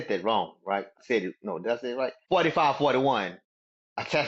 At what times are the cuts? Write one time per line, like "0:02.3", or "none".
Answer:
0:00.9
0:02.2